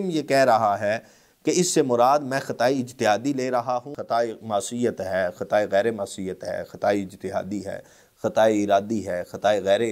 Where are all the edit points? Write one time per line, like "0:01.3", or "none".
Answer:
0:03.9